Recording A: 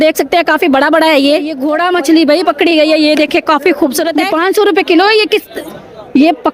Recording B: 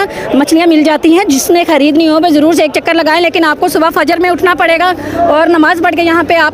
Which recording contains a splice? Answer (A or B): A